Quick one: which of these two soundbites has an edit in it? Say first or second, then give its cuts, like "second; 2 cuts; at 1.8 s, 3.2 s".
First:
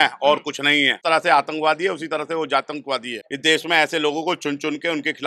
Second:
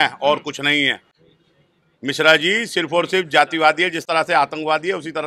first; 2 cuts; at 1.0 s, 3.2 s